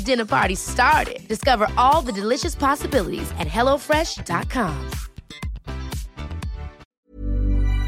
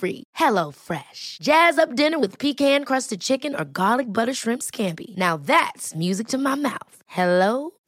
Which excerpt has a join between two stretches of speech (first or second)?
first